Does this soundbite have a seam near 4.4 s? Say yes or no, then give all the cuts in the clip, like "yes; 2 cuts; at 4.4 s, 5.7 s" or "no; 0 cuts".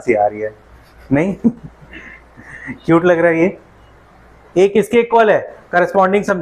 yes; 1 cut; at 4.4 s